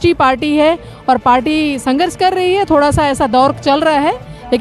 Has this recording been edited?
no; 0 cuts

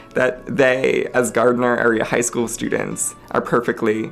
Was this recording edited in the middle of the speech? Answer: no; 0 cuts

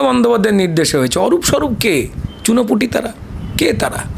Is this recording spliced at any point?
no; 0 cuts

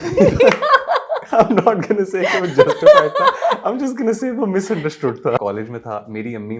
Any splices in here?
yes; 2 cuts; at 1.2 s, 5.4 s

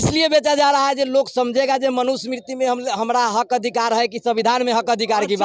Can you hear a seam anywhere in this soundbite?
no; 0 cuts

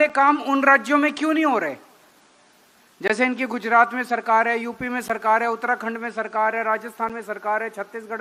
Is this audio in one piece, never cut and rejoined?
yes; 0 cuts

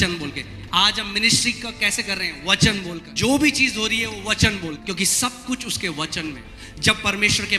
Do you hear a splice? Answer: yes; 3 cuts; at 3.1 s, 4.8 s, 6.5 s

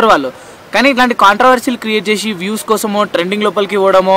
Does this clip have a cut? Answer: no; 0 cuts

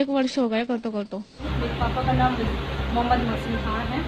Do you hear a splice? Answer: yes; 1 cut; at 1.5 s

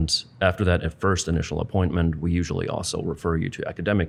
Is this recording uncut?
yes; 0 cuts

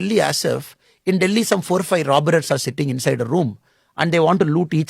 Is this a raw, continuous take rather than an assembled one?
yes; 0 cuts

